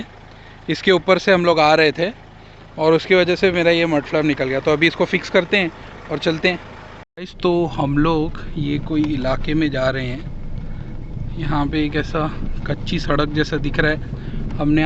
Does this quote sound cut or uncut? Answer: uncut